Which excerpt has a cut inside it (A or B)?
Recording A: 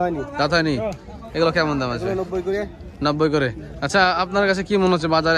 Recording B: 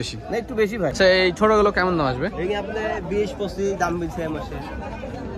B